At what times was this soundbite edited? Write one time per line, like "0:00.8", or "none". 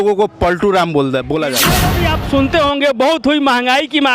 0:01.9